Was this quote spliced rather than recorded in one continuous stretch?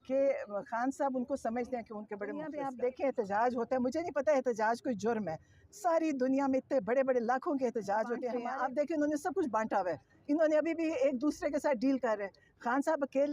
yes; 2 cuts; at 2.5 s, 8.4 s

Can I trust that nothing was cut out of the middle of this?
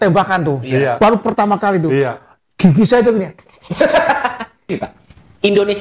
no; 1 cut; at 4.7 s

